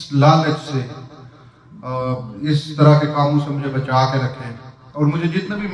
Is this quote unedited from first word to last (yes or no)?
yes